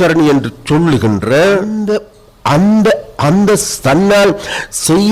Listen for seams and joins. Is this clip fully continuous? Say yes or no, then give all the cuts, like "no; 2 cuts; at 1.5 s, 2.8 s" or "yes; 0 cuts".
no; 1 cut; at 1.8 s